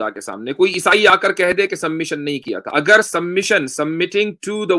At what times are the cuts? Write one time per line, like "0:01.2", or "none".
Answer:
none